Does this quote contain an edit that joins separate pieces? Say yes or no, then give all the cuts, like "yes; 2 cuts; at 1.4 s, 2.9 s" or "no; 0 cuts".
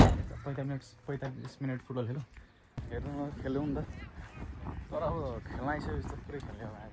yes; 1 cut; at 2.8 s